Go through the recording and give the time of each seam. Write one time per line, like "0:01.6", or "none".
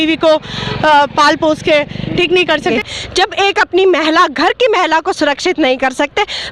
0:02.7